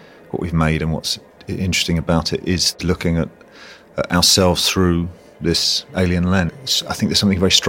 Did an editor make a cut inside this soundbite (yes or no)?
yes